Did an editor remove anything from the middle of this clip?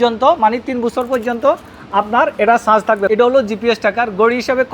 yes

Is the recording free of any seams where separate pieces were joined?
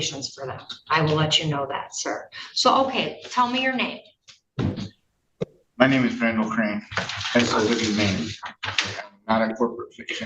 yes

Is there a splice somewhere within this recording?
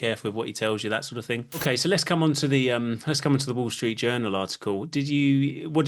yes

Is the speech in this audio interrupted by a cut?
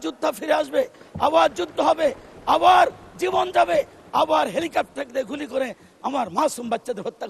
no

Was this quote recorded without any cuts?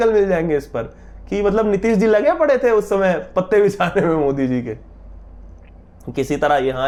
yes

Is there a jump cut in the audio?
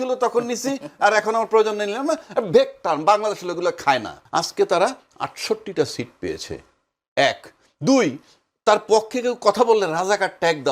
yes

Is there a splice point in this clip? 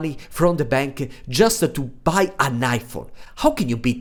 no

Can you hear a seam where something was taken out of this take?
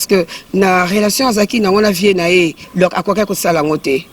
yes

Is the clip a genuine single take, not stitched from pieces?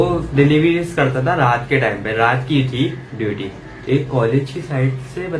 no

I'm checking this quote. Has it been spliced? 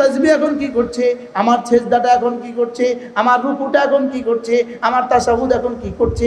no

